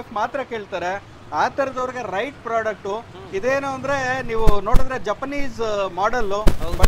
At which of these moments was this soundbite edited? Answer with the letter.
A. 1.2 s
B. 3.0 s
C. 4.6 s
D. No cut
D